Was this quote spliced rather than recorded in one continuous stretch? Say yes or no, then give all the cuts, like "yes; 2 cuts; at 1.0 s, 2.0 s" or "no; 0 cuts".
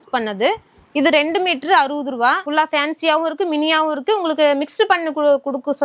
yes; 1 cut; at 2.4 s